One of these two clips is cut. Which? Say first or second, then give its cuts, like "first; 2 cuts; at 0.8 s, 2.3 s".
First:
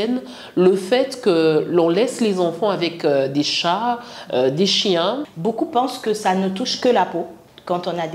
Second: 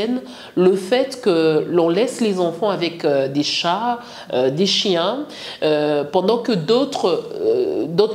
first; 1 cut; at 5.3 s